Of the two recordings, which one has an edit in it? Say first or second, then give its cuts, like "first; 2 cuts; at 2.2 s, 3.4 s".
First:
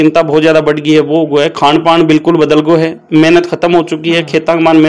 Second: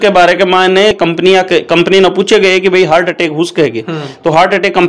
second; 1 cut; at 0.9 s